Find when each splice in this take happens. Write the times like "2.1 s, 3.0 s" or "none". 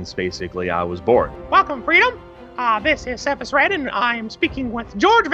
1.4 s